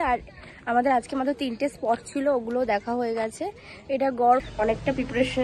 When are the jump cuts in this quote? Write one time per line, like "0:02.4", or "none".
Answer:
0:04.5